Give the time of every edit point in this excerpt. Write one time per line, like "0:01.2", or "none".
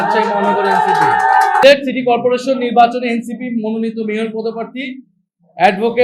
0:01.6